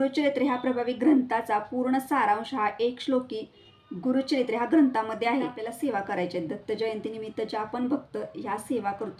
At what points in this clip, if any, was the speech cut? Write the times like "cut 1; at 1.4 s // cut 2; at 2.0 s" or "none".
cut 1; at 5.6 s